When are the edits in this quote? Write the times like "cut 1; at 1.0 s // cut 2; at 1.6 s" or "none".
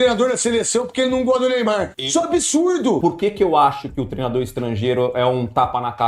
cut 1; at 1.9 s // cut 2; at 3.0 s